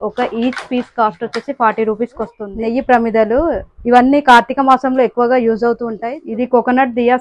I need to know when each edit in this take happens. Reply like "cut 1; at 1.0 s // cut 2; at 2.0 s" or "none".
cut 1; at 2.4 s // cut 2; at 5.9 s

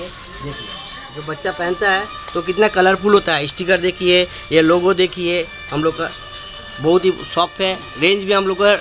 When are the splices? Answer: cut 1; at 0.9 s

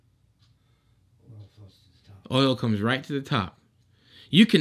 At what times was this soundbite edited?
none

